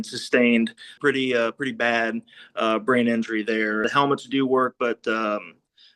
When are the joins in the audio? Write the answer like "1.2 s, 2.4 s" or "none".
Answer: 1.0 s, 3.9 s